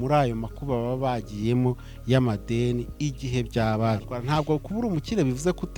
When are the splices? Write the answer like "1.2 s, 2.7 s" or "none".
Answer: 4.1 s